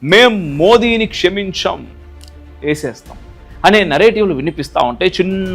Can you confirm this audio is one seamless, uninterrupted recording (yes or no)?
no